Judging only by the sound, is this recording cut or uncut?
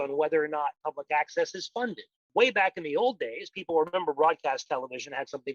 cut